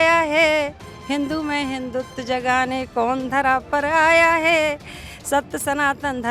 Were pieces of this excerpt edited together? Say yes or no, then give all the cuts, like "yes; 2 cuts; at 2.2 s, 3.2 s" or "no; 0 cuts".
no; 0 cuts